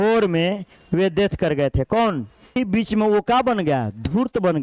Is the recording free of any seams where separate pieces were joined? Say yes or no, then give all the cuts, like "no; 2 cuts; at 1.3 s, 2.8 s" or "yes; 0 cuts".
no; 1 cut; at 2.6 s